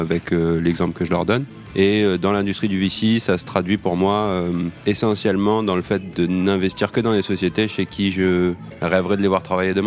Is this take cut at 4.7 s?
yes; 3 cuts; at 1.5 s, 4.7 s, 8.7 s

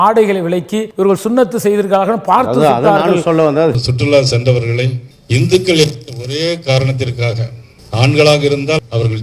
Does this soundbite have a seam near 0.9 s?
yes; 2 cuts; at 0.9 s, 3.7 s

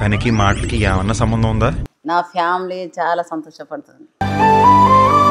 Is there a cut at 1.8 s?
yes; 1 cut; at 1.8 s

